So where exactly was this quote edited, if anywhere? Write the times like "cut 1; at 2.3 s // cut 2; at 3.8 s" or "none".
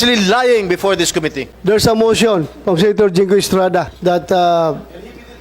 cut 1; at 1.5 s // cut 2; at 3.9 s